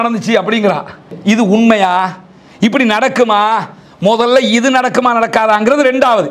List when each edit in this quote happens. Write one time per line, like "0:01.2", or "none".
0:01.1